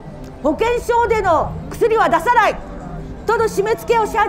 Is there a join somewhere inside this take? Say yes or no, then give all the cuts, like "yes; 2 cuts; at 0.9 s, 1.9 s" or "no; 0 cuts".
no; 0 cuts